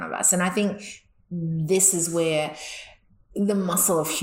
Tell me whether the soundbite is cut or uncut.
uncut